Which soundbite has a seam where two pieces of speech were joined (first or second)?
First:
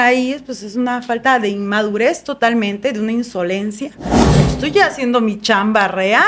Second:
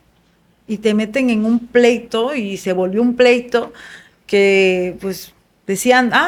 first